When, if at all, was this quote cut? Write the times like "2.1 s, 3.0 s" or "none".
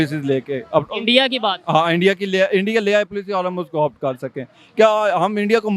none